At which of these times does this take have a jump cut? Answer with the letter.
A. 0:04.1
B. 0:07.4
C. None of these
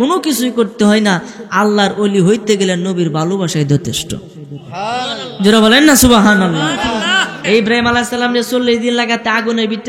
B